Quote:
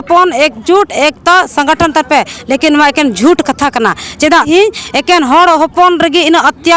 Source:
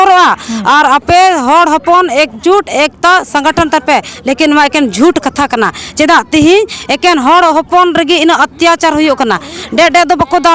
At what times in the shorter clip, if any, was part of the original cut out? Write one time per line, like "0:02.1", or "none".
0:04.5